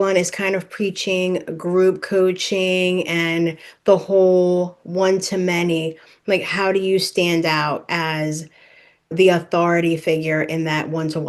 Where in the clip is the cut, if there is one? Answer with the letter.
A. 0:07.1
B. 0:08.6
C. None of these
C